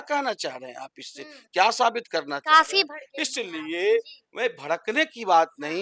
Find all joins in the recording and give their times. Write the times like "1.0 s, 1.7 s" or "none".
none